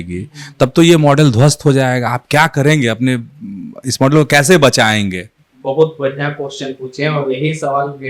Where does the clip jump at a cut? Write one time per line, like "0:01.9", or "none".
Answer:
none